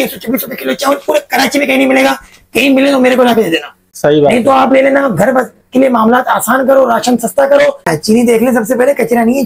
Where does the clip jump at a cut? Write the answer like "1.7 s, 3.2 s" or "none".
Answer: 7.9 s